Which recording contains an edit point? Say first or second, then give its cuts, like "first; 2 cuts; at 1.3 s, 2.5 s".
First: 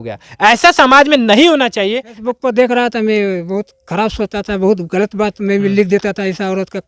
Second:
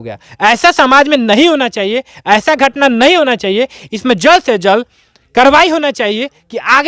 first; 1 cut; at 2.1 s